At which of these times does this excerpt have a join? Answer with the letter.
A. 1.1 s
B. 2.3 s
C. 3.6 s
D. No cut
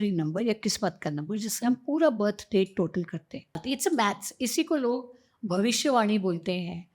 C